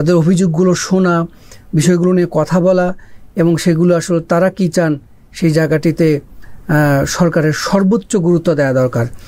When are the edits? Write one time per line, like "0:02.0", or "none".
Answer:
none

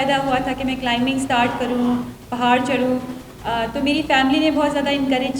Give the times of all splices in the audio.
none

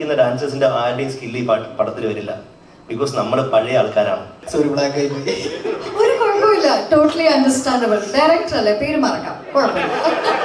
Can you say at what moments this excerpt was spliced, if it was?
0:04.3

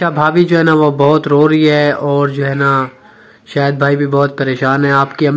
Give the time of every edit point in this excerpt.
none

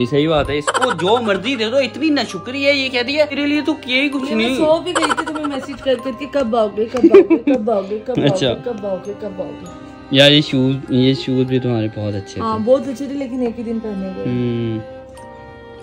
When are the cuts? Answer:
none

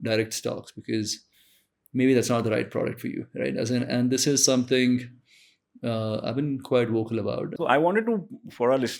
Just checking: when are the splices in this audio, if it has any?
0:07.5

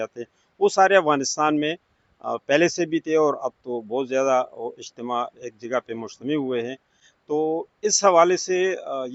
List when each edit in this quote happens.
none

